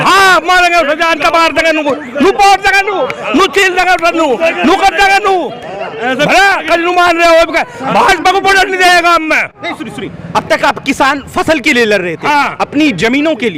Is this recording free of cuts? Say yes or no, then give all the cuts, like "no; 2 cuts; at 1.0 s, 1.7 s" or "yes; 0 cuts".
yes; 0 cuts